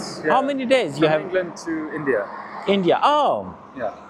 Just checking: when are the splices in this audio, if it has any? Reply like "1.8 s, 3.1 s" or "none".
none